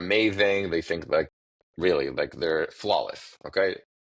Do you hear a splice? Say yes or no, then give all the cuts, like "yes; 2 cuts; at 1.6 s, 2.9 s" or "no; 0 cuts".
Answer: no; 0 cuts